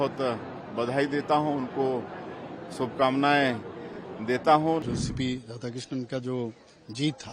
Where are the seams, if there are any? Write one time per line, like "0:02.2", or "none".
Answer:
0:04.8